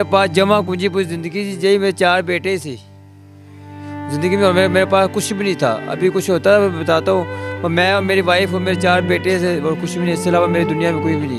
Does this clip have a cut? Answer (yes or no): no